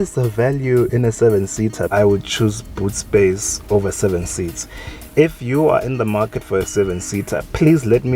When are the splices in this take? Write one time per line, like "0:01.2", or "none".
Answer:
0:01.9

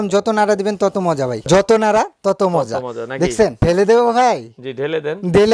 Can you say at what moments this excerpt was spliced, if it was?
0:01.4
0:03.6

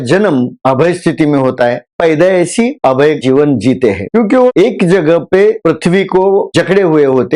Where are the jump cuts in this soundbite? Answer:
0:01.9
0:03.2

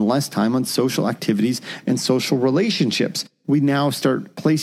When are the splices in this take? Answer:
0:03.3

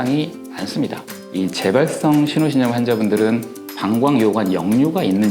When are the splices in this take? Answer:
0:01.2

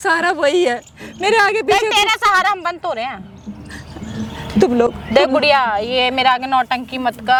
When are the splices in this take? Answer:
none

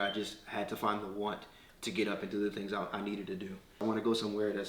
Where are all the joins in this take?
0:03.7

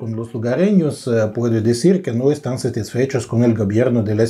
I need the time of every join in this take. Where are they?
none

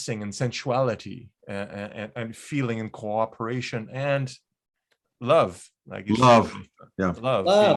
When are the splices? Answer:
none

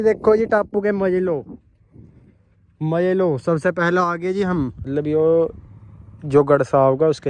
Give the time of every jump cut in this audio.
0:04.8

